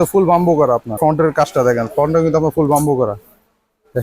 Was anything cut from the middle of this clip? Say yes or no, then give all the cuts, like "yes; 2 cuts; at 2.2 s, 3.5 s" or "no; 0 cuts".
yes; 1 cut; at 0.9 s